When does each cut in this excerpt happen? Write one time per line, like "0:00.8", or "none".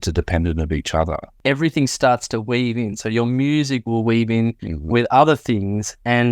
0:01.3